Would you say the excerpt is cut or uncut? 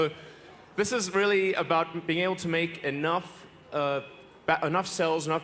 uncut